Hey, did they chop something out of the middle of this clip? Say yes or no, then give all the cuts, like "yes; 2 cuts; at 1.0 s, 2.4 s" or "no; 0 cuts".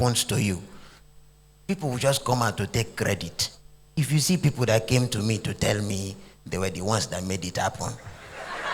yes; 1 cut; at 3.9 s